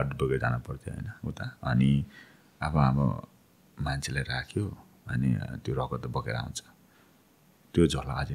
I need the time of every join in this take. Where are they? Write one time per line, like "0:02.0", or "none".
none